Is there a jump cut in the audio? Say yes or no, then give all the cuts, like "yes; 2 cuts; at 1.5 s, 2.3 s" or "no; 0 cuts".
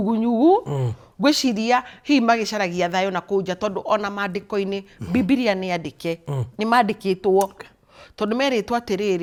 no; 0 cuts